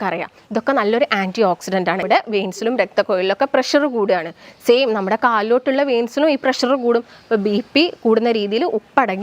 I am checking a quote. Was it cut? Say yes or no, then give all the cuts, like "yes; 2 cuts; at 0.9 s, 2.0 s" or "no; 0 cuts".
yes; 1 cut; at 2.0 s